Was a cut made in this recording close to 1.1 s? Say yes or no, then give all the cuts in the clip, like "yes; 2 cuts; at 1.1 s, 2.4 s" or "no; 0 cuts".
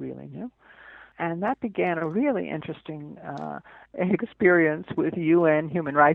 yes; 1 cut; at 1.1 s